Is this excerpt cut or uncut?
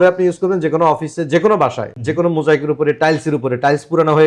uncut